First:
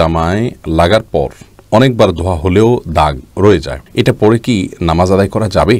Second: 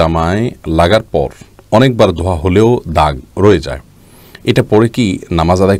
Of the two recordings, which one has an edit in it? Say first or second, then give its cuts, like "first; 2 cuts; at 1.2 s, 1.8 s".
first; 1 cut; at 3.8 s